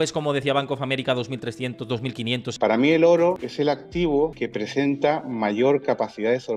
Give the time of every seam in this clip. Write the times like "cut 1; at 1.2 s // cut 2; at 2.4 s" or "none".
cut 1; at 2.5 s // cut 2; at 3.5 s // cut 3; at 4.3 s